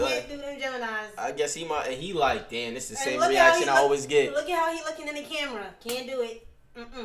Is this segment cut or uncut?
uncut